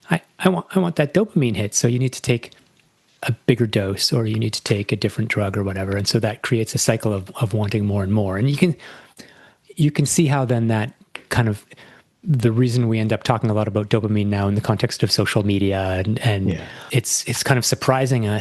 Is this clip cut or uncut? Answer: cut